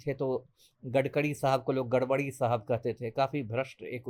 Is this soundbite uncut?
yes; 0 cuts

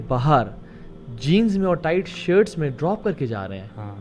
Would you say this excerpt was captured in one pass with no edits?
yes; 0 cuts

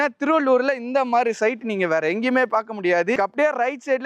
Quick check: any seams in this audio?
no; 0 cuts

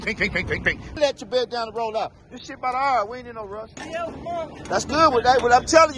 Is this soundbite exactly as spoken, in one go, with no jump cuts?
no; 2 cuts; at 1.0 s, 3.7 s

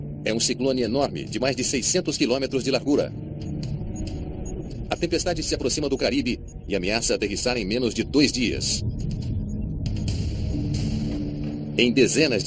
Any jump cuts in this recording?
no; 0 cuts

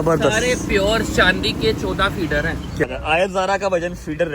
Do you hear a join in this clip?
yes; 1 cut; at 2.8 s

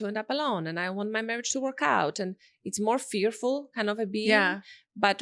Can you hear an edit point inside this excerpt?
no; 0 cuts

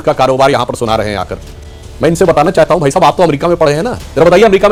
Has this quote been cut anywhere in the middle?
no; 0 cuts

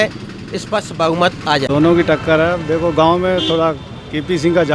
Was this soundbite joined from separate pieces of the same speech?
yes; 1 cut; at 1.7 s

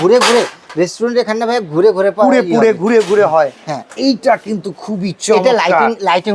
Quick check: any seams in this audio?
yes; 1 cut; at 3.9 s

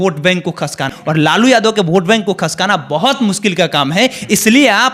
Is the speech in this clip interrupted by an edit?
yes; 1 cut; at 1.0 s

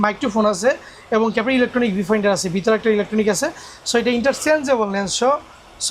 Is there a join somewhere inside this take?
no; 0 cuts

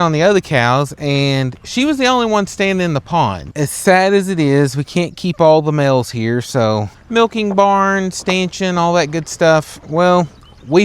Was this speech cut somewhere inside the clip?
yes; 2 cuts; at 3.5 s, 7.0 s

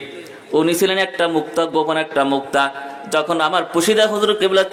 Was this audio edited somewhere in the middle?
no; 0 cuts

